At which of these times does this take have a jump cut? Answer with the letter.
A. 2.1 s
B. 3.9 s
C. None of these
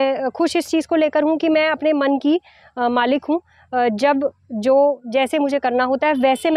C